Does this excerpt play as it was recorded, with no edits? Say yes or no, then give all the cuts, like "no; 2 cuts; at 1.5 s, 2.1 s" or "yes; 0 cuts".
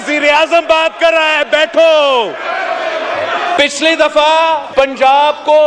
no; 2 cuts; at 3.6 s, 4.7 s